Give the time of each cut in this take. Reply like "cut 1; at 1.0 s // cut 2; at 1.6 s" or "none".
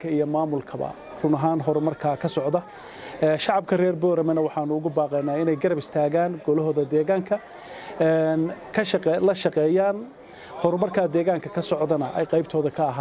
none